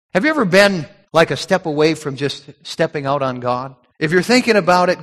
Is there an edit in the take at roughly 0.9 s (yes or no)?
yes